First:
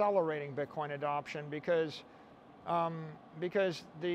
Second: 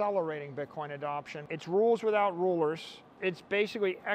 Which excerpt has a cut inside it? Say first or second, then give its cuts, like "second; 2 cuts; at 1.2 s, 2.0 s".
second; 2 cuts; at 1.4 s, 3.1 s